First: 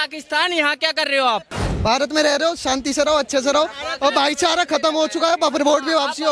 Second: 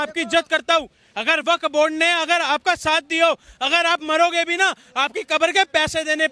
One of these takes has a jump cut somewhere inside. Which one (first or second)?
first